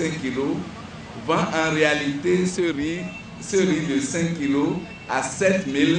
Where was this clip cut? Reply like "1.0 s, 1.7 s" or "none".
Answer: none

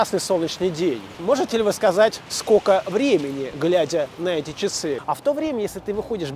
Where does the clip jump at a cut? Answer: 1.1 s, 2.3 s, 5.0 s

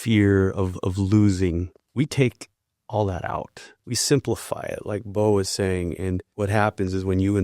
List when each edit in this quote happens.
1.8 s, 3.7 s, 6.3 s

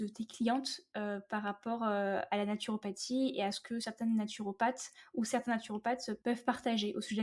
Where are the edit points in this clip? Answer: 6.1 s

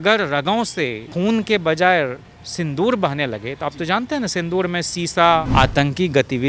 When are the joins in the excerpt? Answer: 1.0 s, 5.5 s

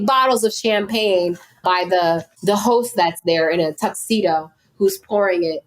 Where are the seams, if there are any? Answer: 1.6 s

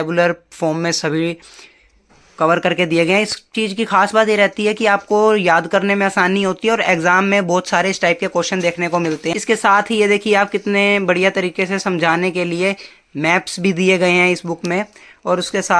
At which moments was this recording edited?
9.3 s

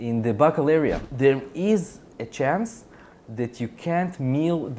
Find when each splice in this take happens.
1.1 s

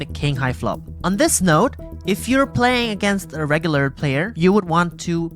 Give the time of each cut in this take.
4.3 s

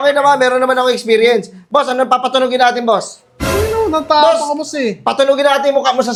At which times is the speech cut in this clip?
none

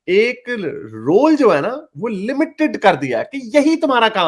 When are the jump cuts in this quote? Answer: none

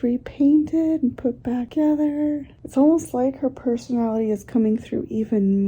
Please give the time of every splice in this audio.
1.7 s, 2.5 s

